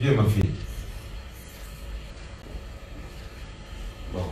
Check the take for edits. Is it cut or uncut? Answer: cut